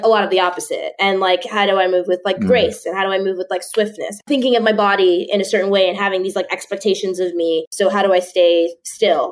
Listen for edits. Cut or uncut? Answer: cut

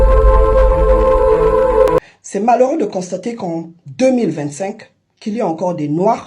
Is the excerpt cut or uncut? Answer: cut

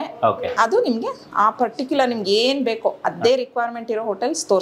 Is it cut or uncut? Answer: uncut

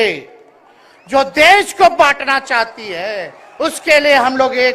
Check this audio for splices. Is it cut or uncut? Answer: uncut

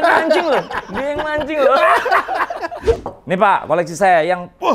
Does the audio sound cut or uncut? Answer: cut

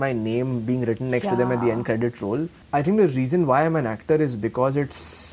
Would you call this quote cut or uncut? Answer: cut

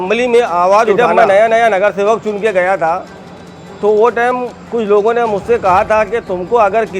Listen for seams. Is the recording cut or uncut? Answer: cut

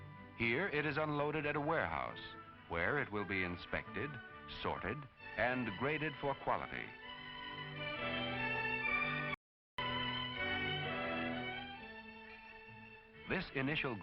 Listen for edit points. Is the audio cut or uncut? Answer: cut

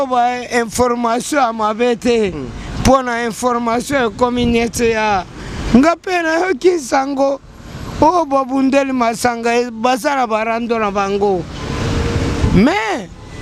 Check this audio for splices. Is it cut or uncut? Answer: uncut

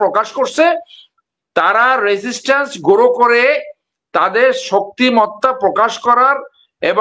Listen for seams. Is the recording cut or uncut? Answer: uncut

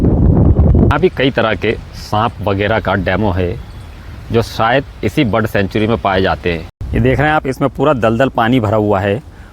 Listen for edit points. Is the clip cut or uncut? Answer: cut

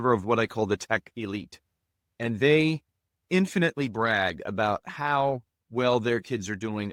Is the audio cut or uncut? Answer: uncut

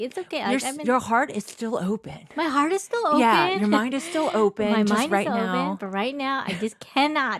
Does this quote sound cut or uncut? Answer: uncut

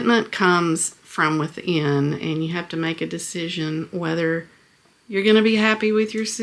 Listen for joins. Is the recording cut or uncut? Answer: uncut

